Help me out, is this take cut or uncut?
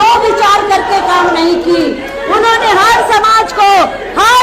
uncut